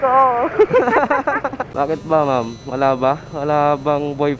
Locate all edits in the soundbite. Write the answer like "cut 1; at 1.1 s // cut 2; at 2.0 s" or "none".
cut 1; at 1.6 s